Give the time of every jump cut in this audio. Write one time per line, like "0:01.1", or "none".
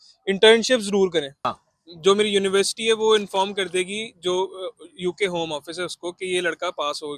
0:01.6

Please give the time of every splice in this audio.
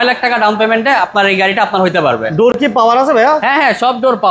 none

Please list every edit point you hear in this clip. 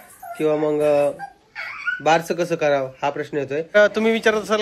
0:03.7

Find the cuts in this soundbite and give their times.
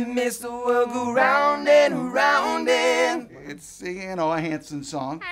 none

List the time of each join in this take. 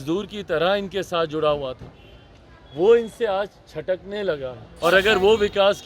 0:04.7

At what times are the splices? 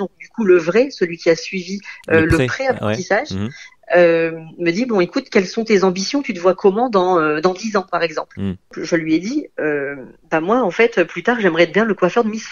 0:08.8

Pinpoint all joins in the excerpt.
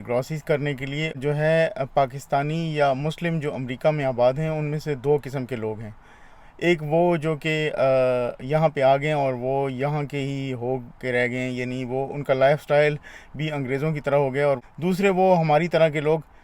0:01.1
0:14.6

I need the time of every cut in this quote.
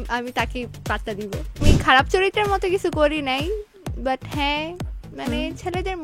0:01.6

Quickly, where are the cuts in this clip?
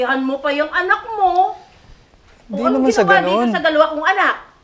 none

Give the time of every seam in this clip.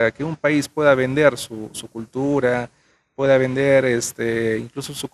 none

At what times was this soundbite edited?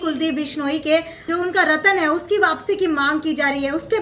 0:01.2

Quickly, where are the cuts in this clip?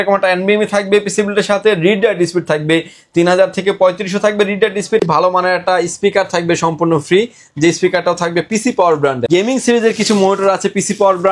0:05.0
0:09.3

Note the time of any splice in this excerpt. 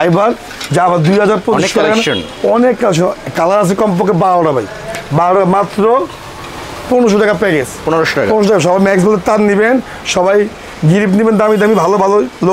none

